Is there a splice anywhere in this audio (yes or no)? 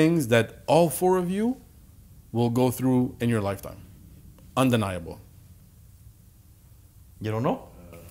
no